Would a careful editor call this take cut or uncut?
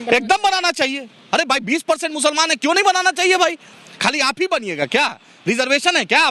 uncut